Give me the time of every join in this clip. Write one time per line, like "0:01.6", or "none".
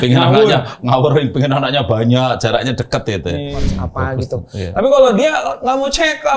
0:03.7